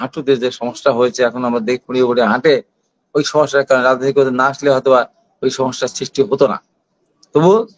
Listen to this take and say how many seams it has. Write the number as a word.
zero